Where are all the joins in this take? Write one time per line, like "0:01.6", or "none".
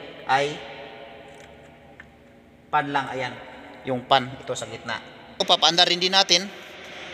0:05.4